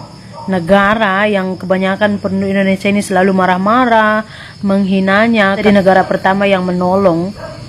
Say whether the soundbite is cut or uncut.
cut